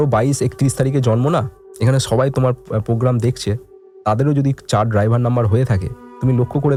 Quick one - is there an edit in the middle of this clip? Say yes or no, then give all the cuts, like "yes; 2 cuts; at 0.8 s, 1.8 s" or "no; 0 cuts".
no; 0 cuts